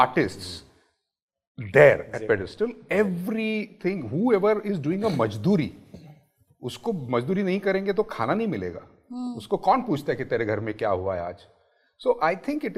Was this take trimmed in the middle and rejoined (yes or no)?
no